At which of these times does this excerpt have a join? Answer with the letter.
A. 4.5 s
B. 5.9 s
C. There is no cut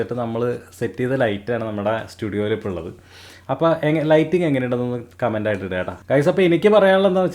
B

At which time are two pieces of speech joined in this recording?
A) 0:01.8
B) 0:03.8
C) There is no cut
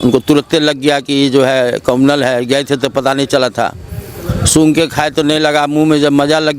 C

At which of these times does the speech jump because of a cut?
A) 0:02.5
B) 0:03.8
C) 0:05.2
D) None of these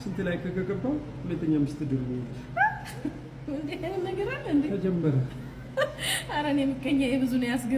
D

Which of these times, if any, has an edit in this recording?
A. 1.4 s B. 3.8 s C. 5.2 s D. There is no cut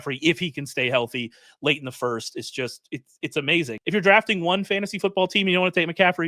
B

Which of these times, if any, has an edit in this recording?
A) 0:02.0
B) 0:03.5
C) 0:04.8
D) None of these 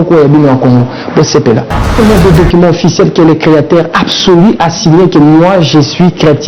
A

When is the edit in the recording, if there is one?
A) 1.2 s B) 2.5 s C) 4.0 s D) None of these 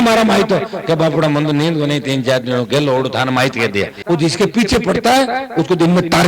C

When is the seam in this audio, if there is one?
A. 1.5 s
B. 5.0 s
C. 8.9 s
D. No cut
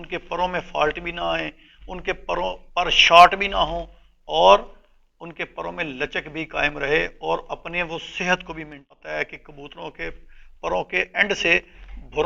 C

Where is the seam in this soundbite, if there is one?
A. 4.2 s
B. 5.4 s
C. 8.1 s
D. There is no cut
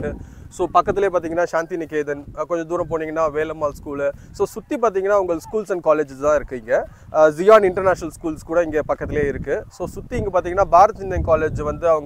D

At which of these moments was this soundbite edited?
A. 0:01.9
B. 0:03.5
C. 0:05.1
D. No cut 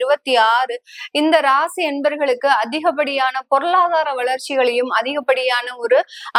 D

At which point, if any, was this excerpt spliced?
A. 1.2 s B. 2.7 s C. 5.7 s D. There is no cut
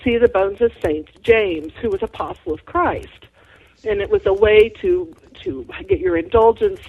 C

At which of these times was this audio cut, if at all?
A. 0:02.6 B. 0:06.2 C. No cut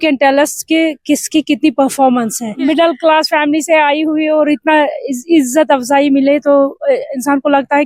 A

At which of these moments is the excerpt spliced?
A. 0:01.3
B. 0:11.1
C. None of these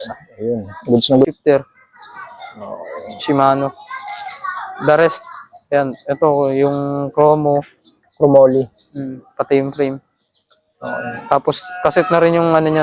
A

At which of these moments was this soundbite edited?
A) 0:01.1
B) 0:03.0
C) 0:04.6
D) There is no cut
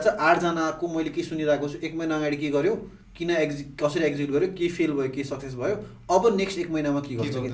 D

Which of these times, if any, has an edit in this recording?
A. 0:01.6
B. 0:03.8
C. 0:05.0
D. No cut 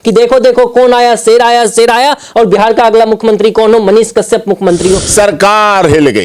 C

